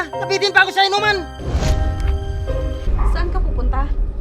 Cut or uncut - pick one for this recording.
cut